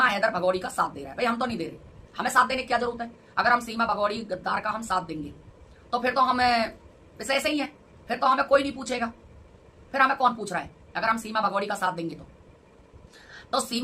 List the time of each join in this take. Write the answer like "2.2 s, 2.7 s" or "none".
none